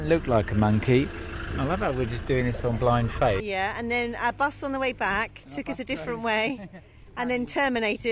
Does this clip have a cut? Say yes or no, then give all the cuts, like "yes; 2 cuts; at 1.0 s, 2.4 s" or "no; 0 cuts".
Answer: yes; 2 cuts; at 1.3 s, 3.6 s